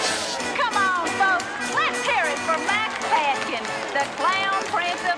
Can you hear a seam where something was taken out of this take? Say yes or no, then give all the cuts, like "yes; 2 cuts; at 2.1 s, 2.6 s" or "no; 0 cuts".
no; 0 cuts